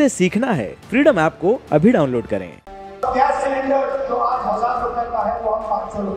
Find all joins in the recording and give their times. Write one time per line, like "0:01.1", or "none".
0:02.6